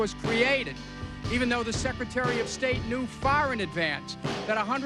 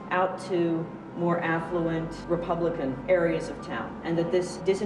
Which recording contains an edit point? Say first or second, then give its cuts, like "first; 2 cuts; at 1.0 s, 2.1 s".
first; 1 cut; at 2.3 s